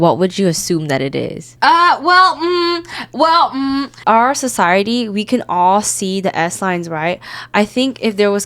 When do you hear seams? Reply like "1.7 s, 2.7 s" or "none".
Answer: 1.5 s, 3.9 s